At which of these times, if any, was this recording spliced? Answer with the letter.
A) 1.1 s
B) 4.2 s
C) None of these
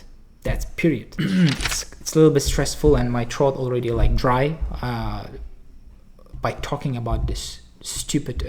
A